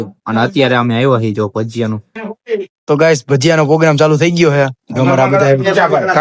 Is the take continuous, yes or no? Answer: no